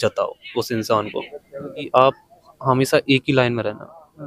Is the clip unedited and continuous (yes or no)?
no